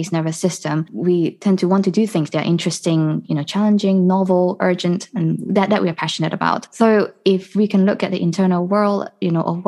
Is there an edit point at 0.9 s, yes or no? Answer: yes